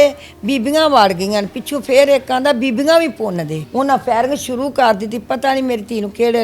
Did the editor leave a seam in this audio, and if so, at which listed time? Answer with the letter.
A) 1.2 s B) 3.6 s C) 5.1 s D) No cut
B